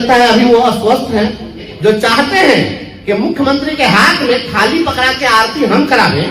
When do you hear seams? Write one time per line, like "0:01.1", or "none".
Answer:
0:01.6